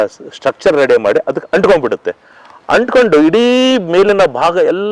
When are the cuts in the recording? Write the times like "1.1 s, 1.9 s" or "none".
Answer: none